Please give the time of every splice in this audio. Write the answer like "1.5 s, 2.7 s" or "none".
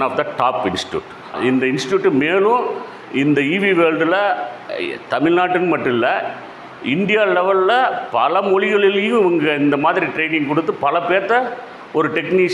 1.3 s